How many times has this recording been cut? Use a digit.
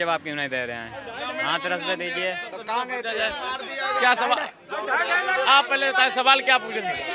0